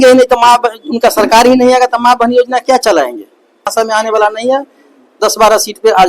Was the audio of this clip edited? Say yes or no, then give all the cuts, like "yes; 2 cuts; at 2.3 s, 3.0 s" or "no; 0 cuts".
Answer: yes; 1 cut; at 3.7 s